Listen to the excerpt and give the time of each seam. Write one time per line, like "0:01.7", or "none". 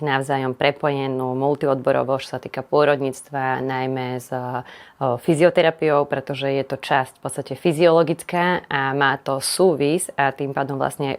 none

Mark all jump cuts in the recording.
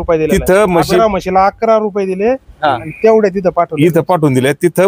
none

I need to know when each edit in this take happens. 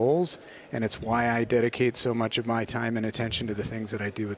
none

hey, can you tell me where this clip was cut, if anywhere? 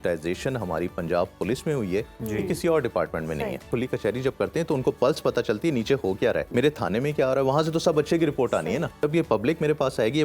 0:03.7
0:06.5
0:09.0

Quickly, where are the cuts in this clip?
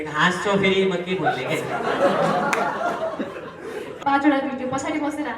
0:03.9

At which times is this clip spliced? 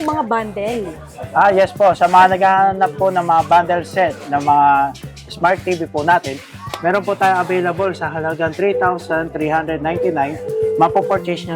none

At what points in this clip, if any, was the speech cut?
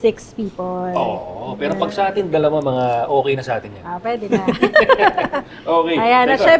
none

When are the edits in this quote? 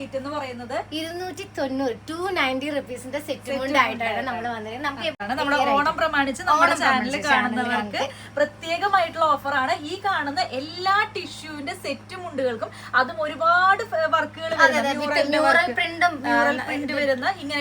0:05.2

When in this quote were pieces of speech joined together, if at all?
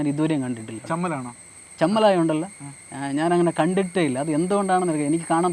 none

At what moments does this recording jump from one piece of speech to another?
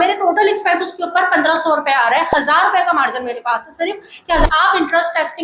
0:04.5

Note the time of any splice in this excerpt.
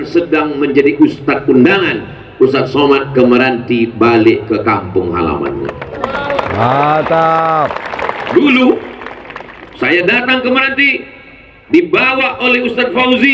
none

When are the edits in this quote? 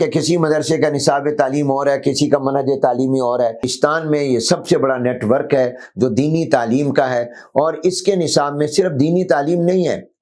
0:03.7

